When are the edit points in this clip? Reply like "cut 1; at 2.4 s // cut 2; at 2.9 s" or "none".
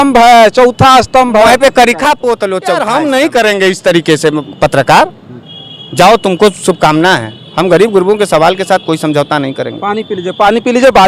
cut 1; at 2.7 s